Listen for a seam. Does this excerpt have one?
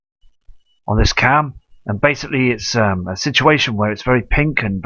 no; 0 cuts

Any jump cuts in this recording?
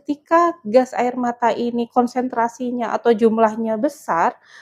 no; 0 cuts

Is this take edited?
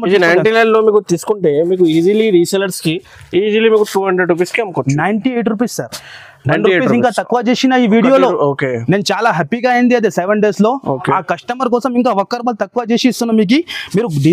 no; 0 cuts

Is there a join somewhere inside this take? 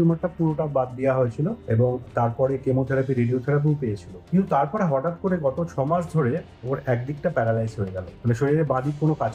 no; 0 cuts

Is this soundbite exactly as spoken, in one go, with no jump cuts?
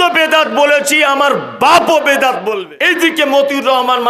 no; 1 cut; at 2.6 s

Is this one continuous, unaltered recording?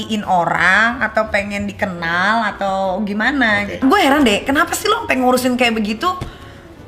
no; 1 cut; at 3.8 s

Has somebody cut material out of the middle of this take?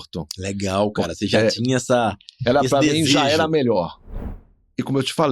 yes; 1 cut; at 4.1 s

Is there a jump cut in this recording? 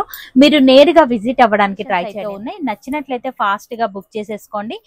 yes; 1 cut; at 2.1 s

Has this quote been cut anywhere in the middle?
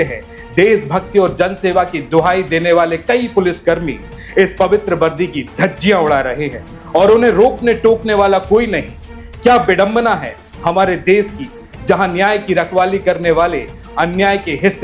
no; 0 cuts

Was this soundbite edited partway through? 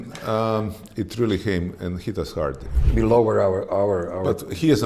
yes; 1 cut; at 2.7 s

